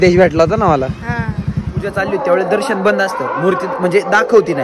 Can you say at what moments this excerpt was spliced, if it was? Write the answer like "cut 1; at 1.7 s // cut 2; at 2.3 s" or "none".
cut 1; at 1.9 s